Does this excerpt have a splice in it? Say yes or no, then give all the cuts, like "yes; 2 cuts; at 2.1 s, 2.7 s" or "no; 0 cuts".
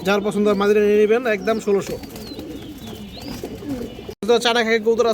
yes; 1 cut; at 4.1 s